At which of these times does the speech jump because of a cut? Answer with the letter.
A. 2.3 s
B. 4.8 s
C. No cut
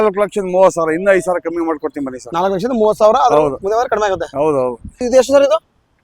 B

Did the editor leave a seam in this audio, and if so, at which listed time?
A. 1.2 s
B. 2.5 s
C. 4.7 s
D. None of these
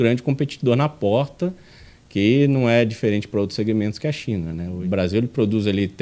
C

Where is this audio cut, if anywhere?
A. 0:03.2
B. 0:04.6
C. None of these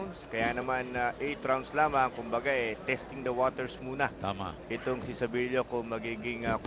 B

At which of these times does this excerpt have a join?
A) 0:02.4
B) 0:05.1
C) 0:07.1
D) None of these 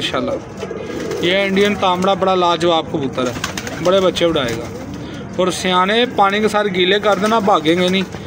D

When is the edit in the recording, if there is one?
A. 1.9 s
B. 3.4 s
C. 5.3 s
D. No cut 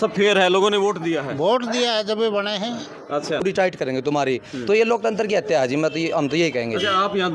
B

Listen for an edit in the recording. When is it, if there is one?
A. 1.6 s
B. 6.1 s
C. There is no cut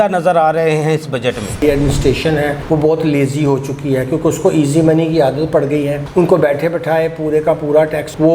A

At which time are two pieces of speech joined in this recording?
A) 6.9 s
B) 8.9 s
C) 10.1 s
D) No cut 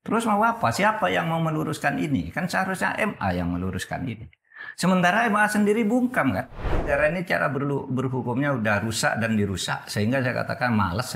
A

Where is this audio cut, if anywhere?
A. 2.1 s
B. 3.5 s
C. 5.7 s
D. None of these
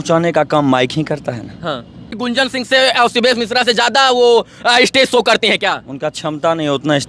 A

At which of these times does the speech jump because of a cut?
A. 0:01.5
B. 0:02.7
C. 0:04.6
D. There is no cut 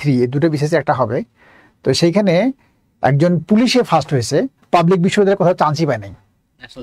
C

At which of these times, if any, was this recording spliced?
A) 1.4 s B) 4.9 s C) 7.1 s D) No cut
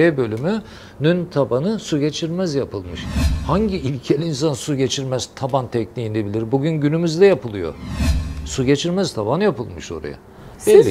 D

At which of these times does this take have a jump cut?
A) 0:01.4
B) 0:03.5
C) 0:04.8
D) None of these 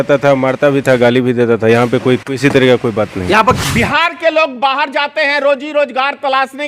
B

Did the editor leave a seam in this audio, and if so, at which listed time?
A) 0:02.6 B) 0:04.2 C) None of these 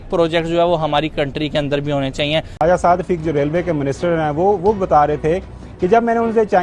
A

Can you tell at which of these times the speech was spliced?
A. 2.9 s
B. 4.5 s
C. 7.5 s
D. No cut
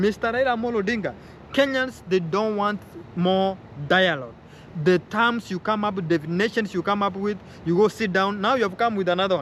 D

